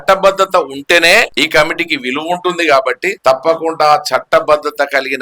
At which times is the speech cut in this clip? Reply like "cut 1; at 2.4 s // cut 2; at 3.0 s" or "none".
cut 1; at 1.3 s // cut 2; at 3.1 s

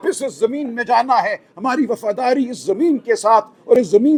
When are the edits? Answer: none

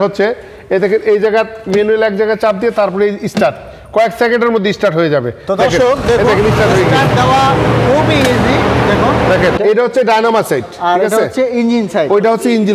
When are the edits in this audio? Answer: cut 1; at 9.6 s

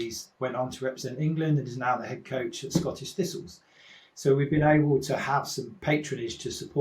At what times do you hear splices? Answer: cut 1; at 5.6 s

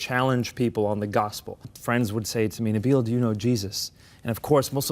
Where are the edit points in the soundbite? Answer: cut 1; at 1.7 s

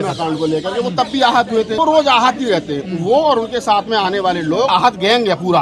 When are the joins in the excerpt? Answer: cut 1; at 1.7 s // cut 2; at 4.7 s

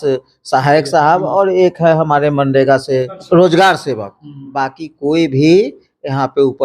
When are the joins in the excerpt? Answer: cut 1; at 3.2 s

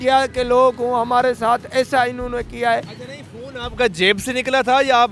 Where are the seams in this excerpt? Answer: none

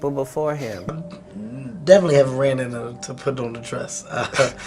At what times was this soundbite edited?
cut 1; at 0.9 s

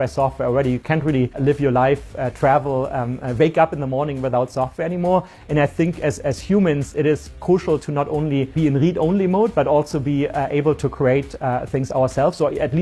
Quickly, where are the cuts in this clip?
cut 1; at 1.4 s // cut 2; at 8.5 s

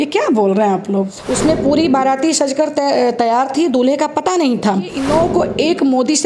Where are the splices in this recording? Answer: cut 1; at 1.2 s // cut 2; at 5.0 s

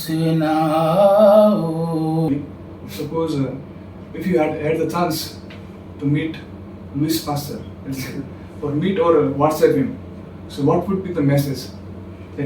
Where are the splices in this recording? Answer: cut 1; at 2.3 s

